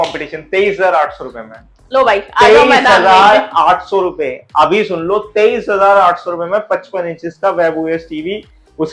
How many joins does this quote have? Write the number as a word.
zero